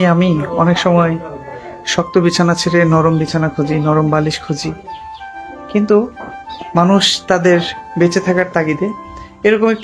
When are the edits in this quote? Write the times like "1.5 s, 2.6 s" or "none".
none